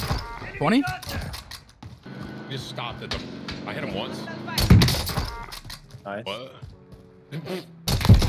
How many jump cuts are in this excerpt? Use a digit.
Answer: 1